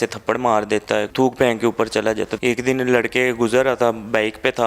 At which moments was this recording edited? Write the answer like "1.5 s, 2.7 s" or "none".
1.1 s, 2.3 s

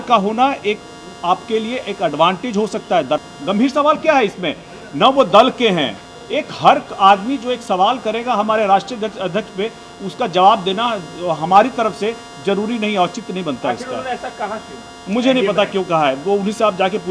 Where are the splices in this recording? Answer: 3.2 s

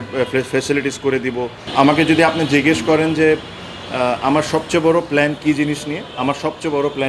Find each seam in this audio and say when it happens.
1.6 s

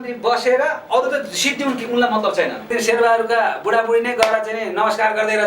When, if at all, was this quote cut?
2.7 s

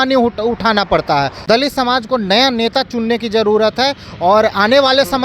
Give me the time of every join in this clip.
1.4 s

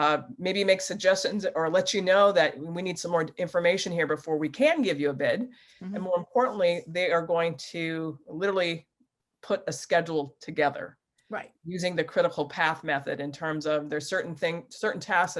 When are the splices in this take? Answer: none

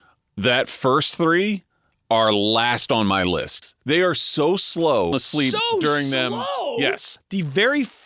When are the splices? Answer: 3.7 s, 5.1 s, 7.2 s

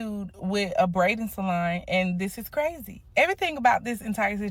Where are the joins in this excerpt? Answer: none

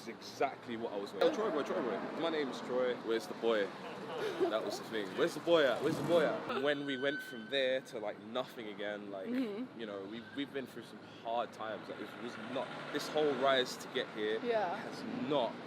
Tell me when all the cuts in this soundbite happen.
1.2 s, 2.1 s, 3.0 s, 6.5 s

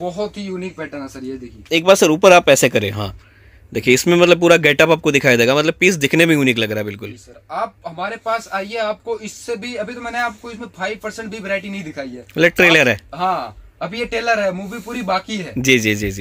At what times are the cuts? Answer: none

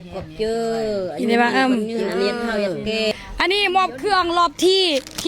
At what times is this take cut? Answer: 3.1 s

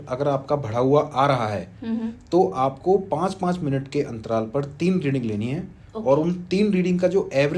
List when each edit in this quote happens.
none

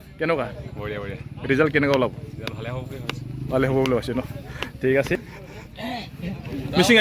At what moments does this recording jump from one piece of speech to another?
5.2 s

